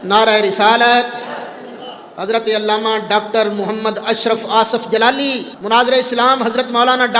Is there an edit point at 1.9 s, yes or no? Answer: no